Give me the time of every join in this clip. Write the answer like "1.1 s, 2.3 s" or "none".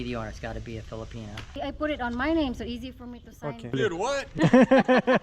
1.6 s, 3.8 s